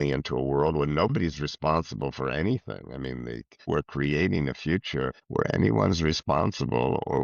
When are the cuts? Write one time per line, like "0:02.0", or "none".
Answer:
0:03.7
0:05.2